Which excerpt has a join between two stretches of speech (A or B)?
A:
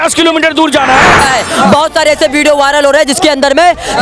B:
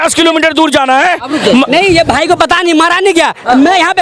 A